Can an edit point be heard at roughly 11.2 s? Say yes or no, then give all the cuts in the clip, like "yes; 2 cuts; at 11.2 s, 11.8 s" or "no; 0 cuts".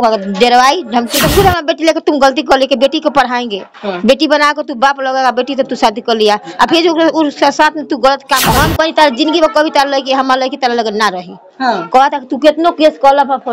no; 2 cuts; at 1.2 s, 8.5 s